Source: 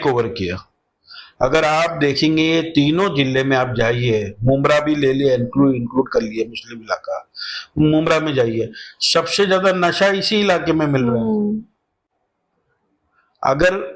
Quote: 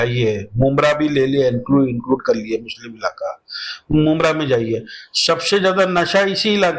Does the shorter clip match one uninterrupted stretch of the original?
yes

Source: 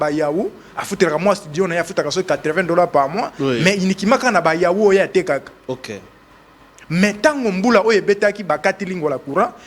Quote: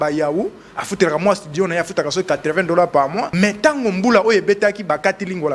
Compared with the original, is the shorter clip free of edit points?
no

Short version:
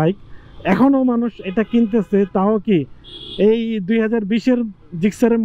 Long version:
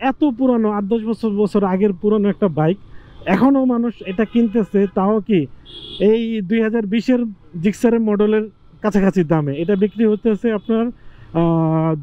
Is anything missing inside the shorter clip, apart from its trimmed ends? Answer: no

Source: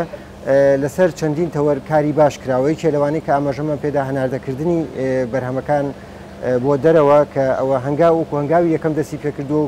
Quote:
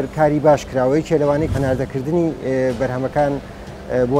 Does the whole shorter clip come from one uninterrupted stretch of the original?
no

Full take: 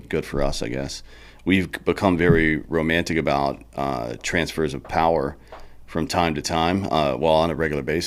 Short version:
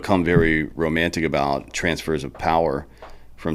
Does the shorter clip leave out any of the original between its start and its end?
yes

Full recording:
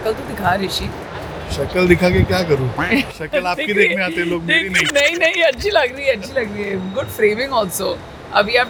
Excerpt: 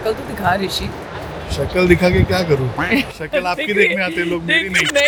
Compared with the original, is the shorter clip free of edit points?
yes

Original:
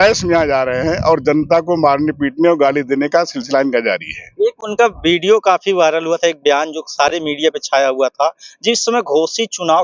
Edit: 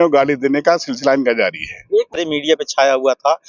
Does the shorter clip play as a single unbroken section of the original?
no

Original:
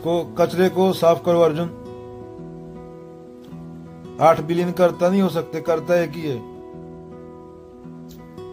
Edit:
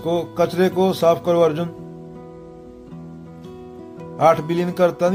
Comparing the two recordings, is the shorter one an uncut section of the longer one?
yes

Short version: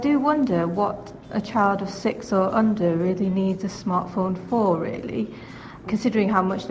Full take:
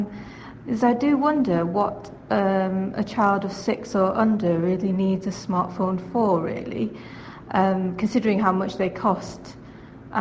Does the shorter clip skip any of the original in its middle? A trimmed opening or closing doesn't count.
yes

